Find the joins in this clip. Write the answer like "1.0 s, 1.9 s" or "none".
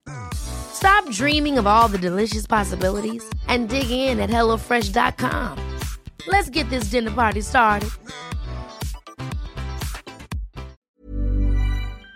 10.8 s